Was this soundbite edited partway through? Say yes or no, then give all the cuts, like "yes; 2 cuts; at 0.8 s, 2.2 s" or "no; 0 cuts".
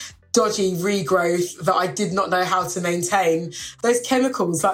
yes; 1 cut; at 3.6 s